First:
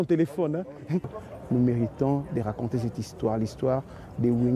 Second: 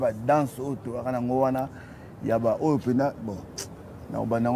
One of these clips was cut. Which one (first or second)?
first